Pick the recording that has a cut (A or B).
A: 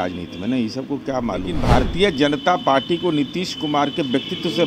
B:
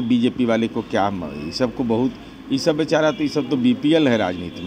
A